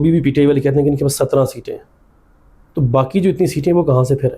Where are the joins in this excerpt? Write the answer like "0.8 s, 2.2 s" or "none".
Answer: none